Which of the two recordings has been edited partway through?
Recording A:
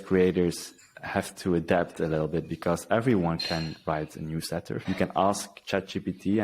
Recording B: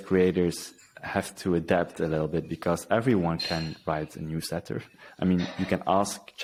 A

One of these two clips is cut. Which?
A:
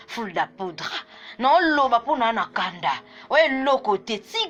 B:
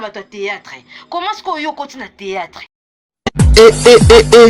B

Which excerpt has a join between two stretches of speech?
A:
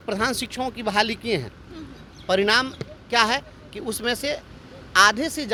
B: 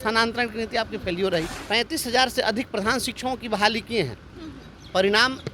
B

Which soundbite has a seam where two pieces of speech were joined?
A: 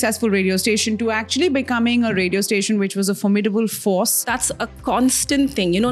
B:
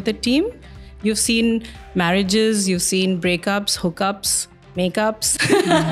A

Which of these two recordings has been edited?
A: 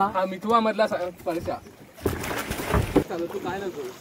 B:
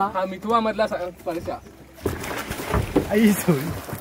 A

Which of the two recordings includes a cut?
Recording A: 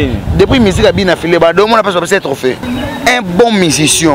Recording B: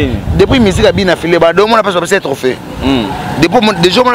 A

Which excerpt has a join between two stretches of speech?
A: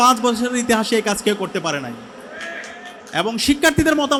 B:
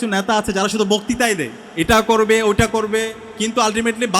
B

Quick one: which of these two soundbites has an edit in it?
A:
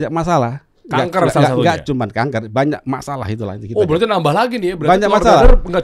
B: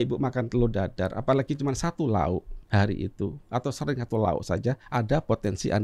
B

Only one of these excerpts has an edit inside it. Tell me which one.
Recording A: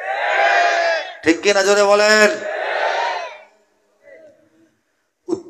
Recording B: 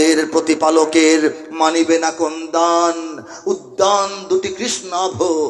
A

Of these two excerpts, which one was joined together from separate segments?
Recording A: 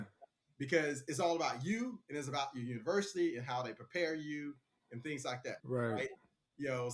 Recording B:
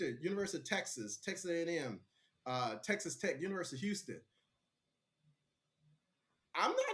A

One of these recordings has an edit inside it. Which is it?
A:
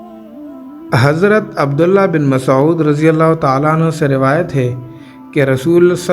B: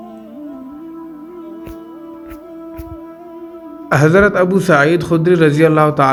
A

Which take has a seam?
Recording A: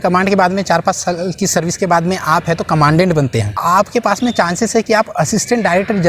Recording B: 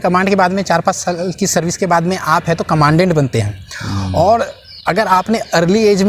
A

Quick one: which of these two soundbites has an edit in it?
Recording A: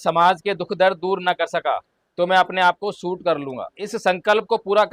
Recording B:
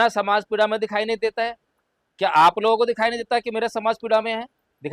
A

